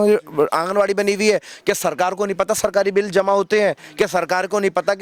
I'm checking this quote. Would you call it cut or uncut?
uncut